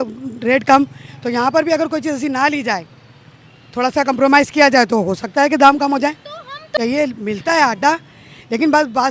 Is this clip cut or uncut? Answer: cut